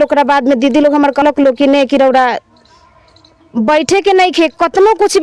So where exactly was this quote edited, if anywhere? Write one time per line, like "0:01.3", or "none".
0:01.2